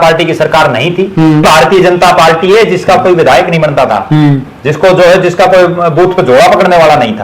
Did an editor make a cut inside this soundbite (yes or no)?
yes